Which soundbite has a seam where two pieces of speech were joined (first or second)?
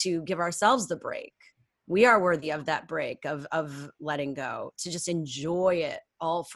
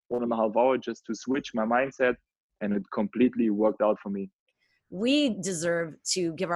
second